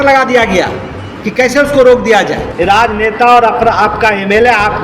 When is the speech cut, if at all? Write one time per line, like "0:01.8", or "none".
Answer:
0:02.4